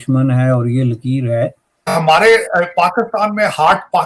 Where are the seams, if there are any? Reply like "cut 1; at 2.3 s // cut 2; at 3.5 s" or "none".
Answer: cut 1; at 1.9 s